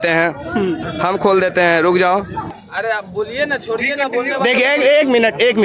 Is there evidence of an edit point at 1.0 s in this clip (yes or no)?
no